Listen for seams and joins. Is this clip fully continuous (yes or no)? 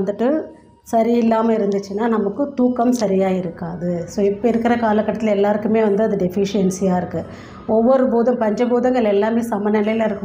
yes